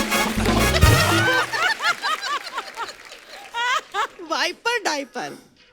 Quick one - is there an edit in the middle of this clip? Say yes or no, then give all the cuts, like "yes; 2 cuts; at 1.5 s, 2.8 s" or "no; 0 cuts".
yes; 1 cut; at 1.5 s